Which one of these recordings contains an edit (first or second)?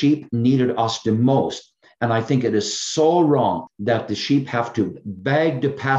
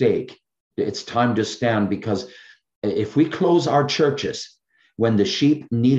first